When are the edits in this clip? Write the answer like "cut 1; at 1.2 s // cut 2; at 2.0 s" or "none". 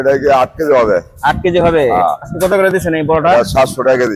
none